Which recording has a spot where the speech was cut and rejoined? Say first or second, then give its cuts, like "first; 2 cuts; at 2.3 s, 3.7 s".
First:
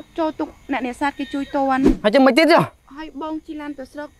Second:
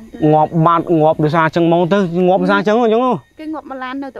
first; 2 cuts; at 2.0 s, 2.8 s